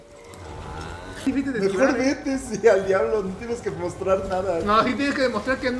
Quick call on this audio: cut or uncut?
cut